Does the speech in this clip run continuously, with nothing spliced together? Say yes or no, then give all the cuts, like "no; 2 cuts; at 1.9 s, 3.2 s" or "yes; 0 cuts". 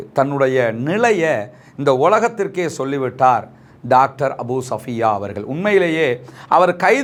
yes; 0 cuts